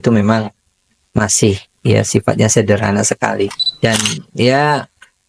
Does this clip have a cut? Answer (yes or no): yes